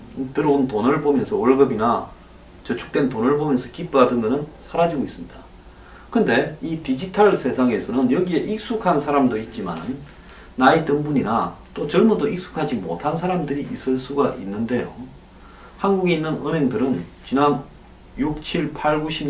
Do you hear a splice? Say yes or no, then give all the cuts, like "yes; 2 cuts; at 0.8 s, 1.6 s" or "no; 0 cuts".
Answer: no; 0 cuts